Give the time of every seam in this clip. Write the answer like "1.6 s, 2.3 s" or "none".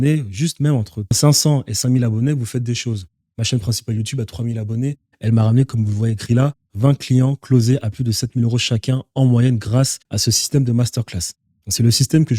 1.2 s